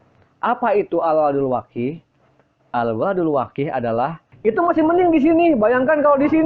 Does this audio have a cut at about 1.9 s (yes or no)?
no